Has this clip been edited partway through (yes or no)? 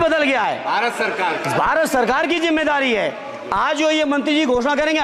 no